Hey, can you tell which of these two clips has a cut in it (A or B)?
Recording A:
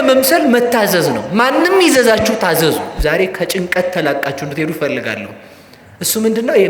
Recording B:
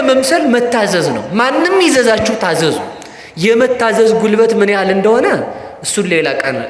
A